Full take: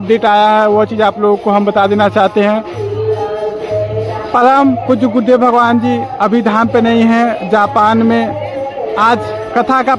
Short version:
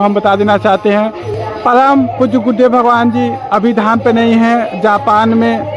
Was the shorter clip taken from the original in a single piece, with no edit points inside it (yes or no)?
no